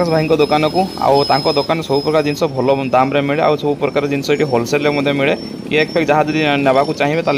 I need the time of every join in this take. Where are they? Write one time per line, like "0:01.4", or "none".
none